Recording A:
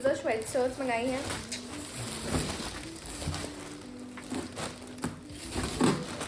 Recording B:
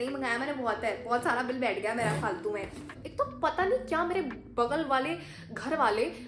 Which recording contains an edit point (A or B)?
B